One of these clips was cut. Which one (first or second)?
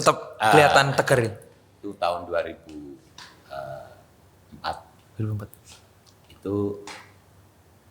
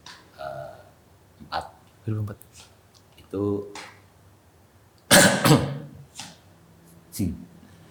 first